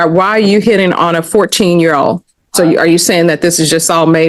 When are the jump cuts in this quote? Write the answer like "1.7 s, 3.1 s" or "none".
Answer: 2.3 s